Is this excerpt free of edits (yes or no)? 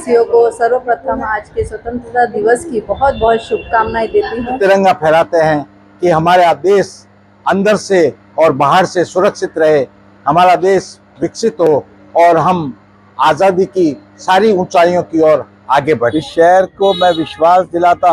no